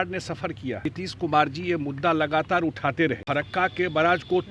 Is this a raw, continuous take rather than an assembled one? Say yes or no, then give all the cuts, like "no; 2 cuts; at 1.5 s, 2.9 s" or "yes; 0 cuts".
no; 2 cuts; at 0.9 s, 3.2 s